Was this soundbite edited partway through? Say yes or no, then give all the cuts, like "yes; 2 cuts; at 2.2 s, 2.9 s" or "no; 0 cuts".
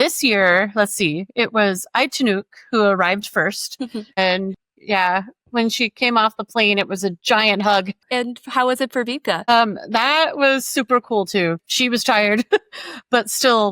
yes; 3 cuts; at 4.1 s, 8.0 s, 11.6 s